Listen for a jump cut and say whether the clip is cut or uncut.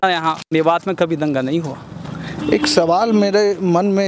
uncut